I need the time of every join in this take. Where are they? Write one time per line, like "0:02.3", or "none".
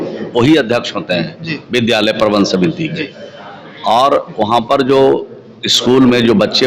none